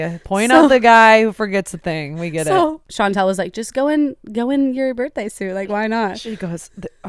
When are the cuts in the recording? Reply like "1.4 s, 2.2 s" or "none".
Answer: 2.8 s